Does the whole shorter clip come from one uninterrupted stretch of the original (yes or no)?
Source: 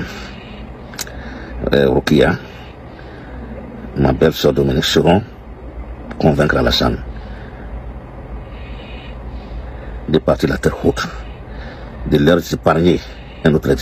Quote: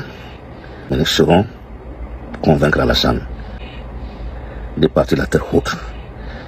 no